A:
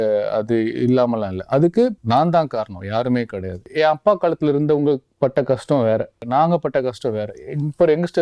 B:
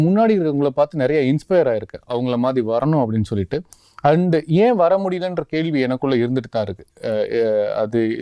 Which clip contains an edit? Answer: A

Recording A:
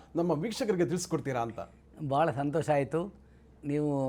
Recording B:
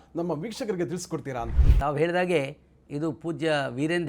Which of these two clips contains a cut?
B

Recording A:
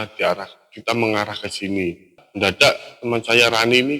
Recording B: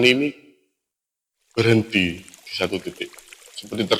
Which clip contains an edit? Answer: A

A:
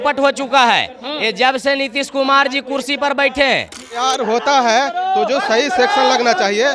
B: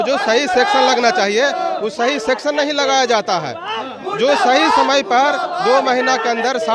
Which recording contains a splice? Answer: A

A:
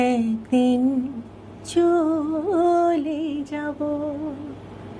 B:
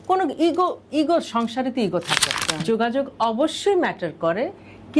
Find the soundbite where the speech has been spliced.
B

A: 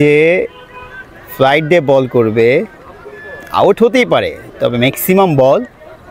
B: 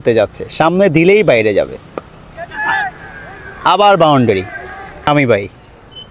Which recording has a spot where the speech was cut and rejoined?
B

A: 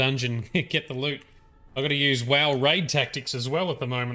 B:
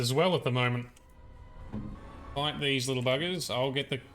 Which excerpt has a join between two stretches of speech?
B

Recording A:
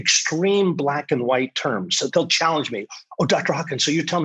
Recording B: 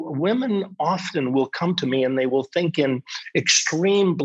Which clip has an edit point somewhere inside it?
A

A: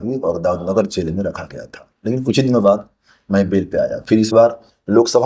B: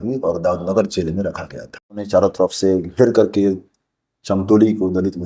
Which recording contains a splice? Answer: B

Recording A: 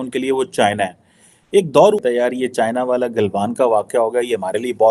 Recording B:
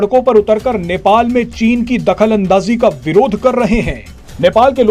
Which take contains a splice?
A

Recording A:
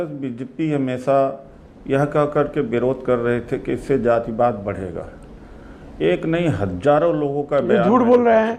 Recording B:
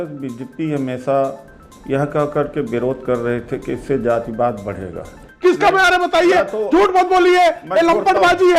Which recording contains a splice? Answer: B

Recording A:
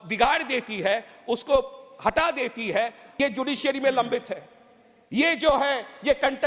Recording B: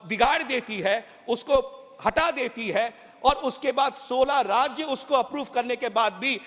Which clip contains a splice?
A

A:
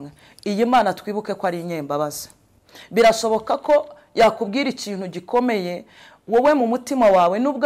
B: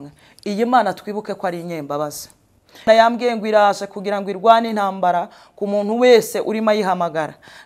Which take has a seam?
B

